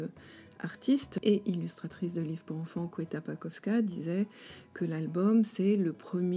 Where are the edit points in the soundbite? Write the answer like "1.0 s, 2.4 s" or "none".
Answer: 1.1 s